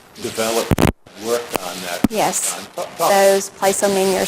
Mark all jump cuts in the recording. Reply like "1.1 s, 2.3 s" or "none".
none